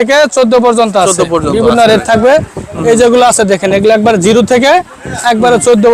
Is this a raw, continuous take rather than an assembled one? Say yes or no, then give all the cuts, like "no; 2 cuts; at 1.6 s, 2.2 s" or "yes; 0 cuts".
yes; 0 cuts